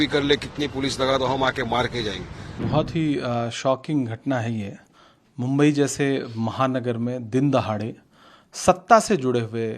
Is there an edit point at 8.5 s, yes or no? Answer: no